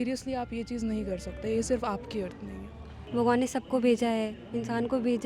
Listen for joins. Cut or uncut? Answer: cut